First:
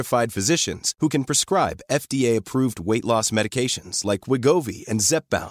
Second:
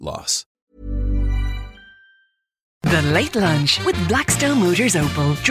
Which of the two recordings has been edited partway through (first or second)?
second